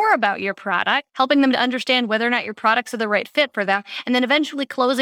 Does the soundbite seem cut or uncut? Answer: cut